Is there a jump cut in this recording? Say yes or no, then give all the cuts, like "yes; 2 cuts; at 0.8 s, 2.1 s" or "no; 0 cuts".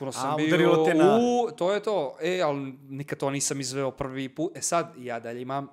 no; 0 cuts